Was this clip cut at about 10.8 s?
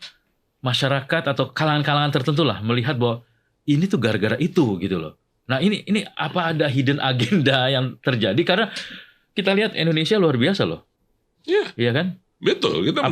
no; 0 cuts

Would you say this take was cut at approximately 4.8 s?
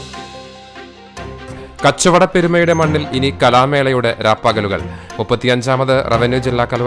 no; 1 cut; at 1.7 s

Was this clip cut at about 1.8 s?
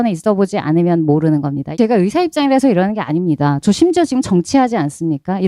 yes; 1 cut; at 1.8 s

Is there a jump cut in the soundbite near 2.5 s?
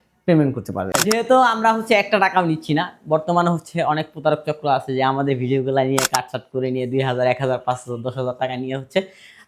no; 1 cut; at 0.9 s

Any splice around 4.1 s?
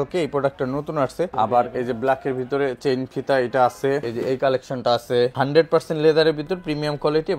yes; 3 cuts; at 1.3 s, 4.1 s, 5.3 s

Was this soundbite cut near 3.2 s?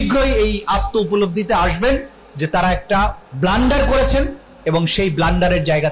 yes; 1 cut; at 3.2 s

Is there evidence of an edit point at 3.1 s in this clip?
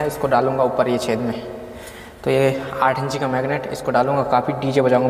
no; 0 cuts

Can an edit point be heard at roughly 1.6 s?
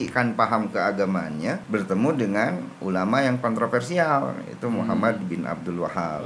yes; 1 cut; at 1.6 s

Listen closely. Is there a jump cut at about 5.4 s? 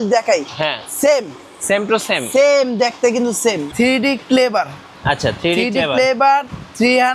no; 1 cut; at 3.7 s

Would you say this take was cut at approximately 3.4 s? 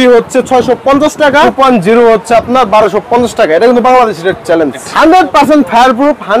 no; 2 cuts; at 1.5 s, 4.9 s

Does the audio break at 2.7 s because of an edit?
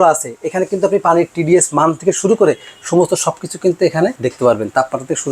no; 1 cut; at 4.2 s

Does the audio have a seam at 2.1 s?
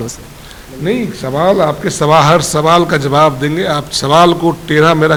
no; 0 cuts

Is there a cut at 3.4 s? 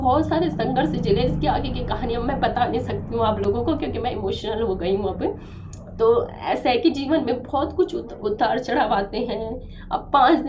no; 0 cuts

